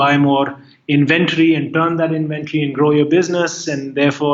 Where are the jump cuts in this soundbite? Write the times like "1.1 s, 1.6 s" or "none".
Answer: none